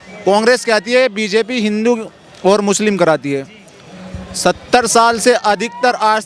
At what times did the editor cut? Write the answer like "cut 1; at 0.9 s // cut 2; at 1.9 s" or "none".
none